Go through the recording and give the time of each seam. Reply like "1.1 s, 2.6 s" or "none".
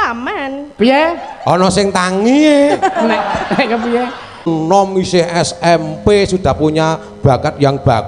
4.5 s